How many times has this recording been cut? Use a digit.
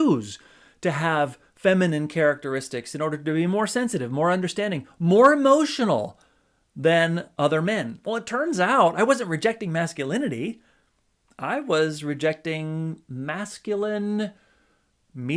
0